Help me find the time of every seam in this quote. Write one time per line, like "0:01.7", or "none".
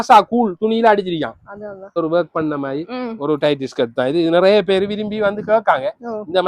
0:02.0